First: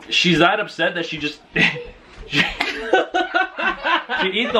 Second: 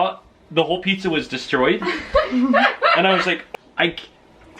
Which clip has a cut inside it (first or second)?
second